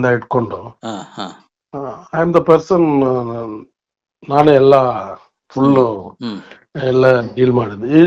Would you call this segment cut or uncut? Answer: uncut